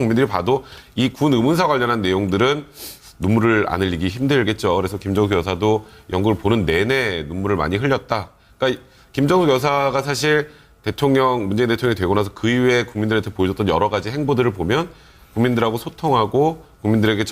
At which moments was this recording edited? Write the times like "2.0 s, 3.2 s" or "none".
none